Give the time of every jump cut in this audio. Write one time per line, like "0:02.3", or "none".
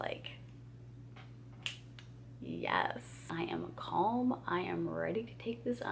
0:03.2

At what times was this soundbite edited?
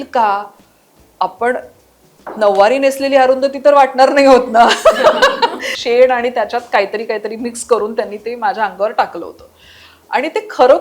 0:05.7

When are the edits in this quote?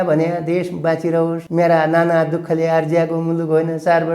0:01.4

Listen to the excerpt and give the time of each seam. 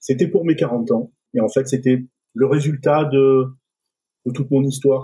0:01.2
0:02.2

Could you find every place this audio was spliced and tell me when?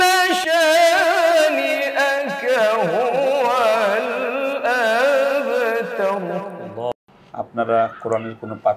0:06.9

